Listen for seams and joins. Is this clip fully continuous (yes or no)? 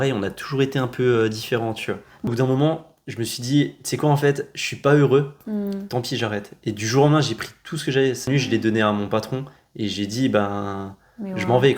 no